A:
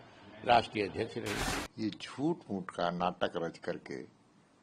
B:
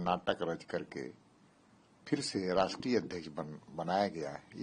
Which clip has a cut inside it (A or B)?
A